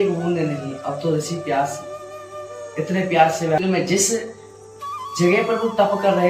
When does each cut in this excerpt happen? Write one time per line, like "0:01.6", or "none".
0:03.6